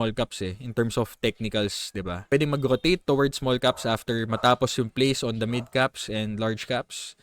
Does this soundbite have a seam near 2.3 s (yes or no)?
yes